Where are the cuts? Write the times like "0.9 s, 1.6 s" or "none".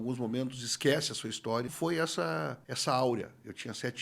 1.7 s, 2.6 s